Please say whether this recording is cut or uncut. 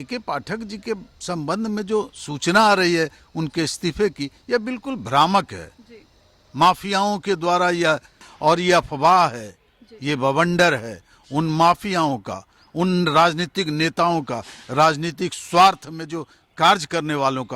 cut